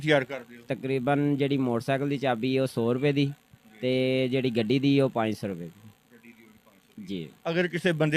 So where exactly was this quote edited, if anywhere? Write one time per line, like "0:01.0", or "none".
none